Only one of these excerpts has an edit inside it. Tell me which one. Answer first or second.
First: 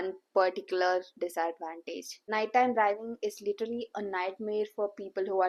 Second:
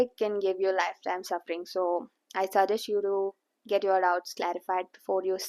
first